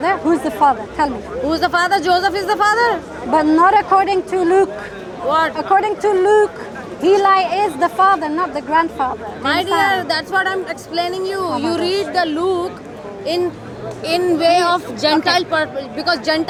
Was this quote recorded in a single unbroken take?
yes; 0 cuts

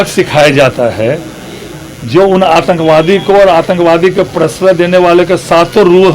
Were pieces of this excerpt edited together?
no; 0 cuts

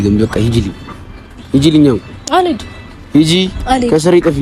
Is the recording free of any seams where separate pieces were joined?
yes; 0 cuts

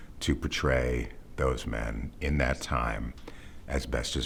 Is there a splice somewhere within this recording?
no; 0 cuts

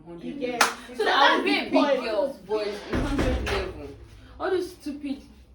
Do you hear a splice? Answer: yes; 1 cut; at 2.4 s

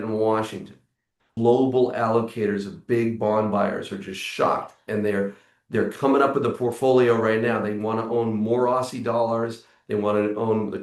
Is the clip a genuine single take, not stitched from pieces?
no; 1 cut; at 1.3 s

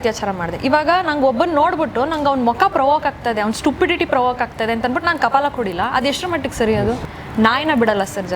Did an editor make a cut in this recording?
yes; 1 cut; at 7.1 s

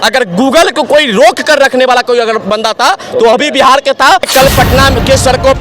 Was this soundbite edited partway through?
yes; 1 cut; at 4.3 s

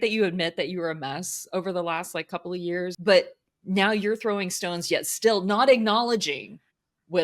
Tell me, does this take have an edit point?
yes; 1 cut; at 3.0 s

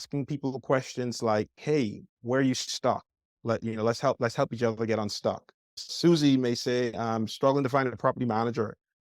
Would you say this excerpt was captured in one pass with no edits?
no; 3 cuts; at 2.1 s, 5.8 s, 6.9 s

